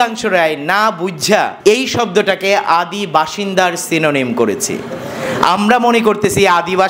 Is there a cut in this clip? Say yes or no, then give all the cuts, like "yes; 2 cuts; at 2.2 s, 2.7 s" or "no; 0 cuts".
yes; 1 cut; at 1.5 s